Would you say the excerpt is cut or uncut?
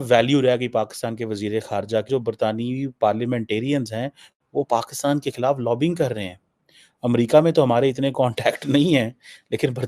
cut